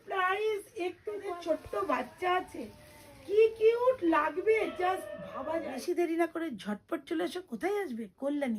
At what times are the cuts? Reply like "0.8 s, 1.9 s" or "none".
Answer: 1.3 s, 5.8 s